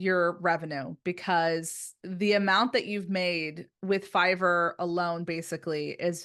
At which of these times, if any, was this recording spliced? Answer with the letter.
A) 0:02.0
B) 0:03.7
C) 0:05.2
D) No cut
D